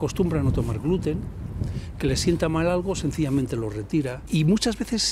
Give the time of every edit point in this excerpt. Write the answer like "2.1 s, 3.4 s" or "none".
4.2 s